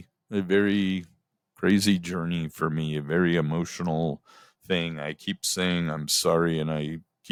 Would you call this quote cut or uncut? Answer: uncut